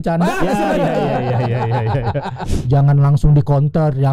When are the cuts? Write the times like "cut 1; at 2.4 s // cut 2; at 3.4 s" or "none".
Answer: cut 1; at 2.5 s